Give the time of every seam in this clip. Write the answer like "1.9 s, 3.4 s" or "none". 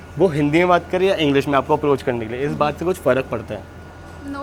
none